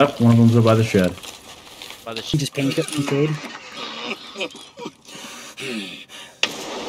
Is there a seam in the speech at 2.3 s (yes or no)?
yes